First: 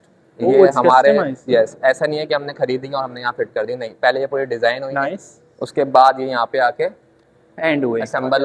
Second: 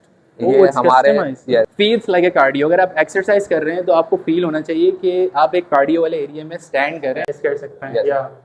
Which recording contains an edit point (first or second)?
second